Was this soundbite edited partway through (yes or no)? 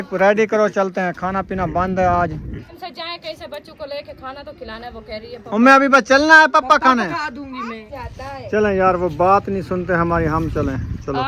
yes